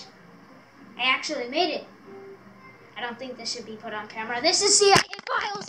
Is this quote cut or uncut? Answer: uncut